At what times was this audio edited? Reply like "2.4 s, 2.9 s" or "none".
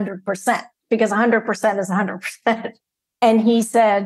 2.8 s